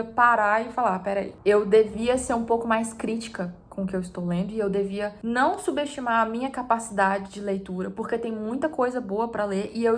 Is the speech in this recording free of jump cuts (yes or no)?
yes